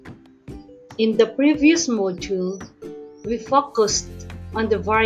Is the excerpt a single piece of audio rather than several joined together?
no; 1 cut; at 1.0 s

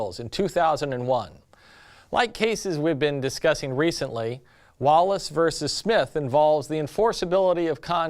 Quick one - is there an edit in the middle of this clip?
yes; 1 cut; at 6.7 s

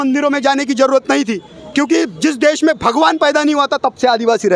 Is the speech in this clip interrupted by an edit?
no; 0 cuts

